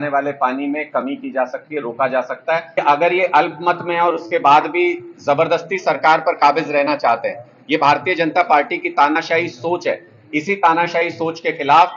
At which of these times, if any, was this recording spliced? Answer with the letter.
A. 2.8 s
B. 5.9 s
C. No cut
A